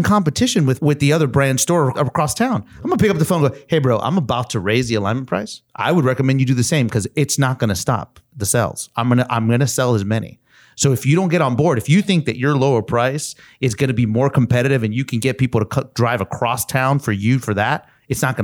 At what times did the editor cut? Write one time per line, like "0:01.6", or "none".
0:00.8
0:01.9
0:05.6